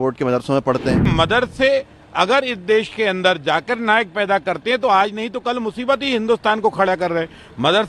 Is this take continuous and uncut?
no; 1 cut; at 1.1 s

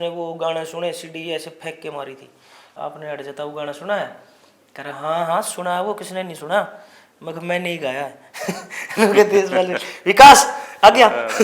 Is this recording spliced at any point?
yes; 1 cut; at 2.7 s

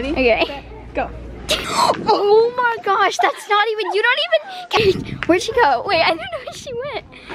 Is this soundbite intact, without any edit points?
no; 2 cuts; at 1.7 s, 4.8 s

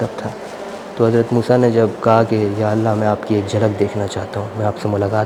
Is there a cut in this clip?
no; 0 cuts

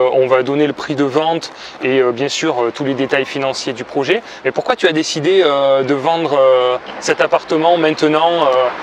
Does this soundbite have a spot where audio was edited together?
no; 0 cuts

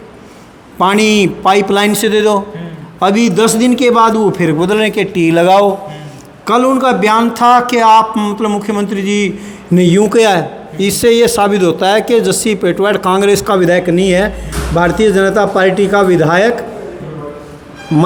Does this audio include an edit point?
no; 0 cuts

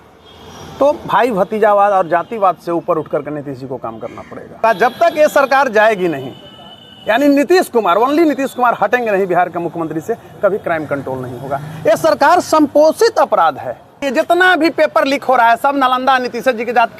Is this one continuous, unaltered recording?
no; 2 cuts; at 4.6 s, 14.1 s

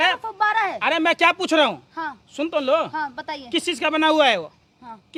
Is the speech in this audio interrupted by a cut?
no; 0 cuts

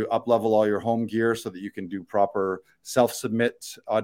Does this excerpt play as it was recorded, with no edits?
yes; 0 cuts

